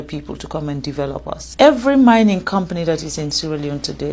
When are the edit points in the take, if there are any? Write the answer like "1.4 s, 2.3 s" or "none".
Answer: 1.6 s